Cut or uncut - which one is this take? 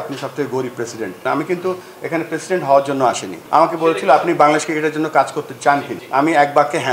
cut